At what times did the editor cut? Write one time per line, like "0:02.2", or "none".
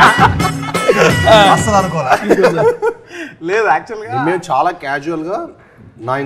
none